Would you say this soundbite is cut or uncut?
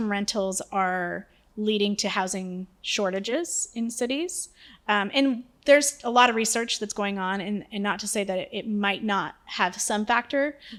uncut